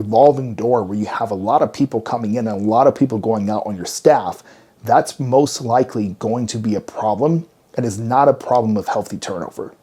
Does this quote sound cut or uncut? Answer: uncut